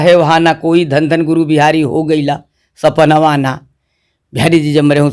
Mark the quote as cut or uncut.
uncut